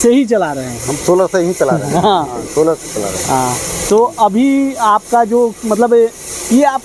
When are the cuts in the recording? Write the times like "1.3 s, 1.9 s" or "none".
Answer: none